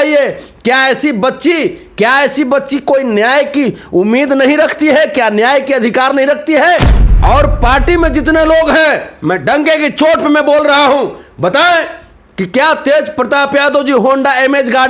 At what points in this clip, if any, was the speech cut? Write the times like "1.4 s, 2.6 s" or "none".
6.9 s